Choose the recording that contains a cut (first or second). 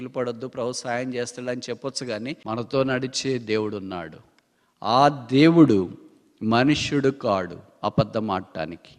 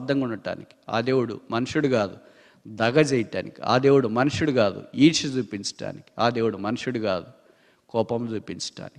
first